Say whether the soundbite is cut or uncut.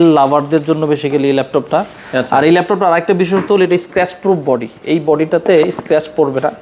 uncut